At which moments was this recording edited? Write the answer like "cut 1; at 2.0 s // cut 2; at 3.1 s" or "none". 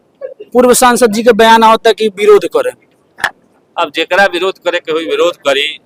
none